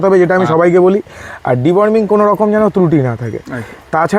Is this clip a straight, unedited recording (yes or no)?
yes